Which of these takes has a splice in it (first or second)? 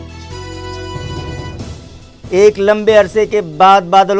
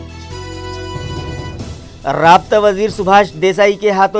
second